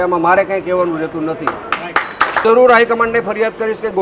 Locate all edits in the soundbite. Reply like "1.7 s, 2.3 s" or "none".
2.4 s